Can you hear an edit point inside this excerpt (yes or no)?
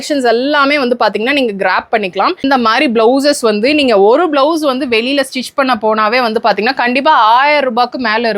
yes